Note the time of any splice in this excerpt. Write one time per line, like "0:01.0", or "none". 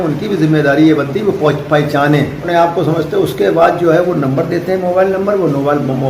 0:02.4